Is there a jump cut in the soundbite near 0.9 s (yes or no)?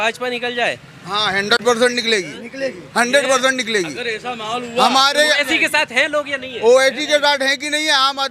no